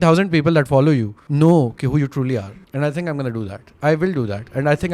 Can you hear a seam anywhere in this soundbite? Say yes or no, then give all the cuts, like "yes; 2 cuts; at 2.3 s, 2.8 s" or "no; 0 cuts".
yes; 2 cuts; at 1.2 s, 2.4 s